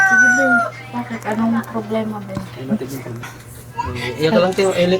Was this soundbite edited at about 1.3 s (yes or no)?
no